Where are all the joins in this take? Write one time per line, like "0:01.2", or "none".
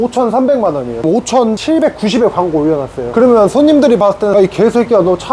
0:01.0
0:04.3